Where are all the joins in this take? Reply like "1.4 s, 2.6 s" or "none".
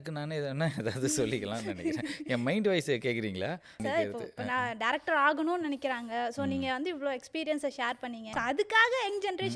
3.8 s, 8.3 s